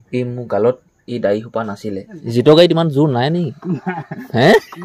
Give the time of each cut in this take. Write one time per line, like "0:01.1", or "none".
0:02.2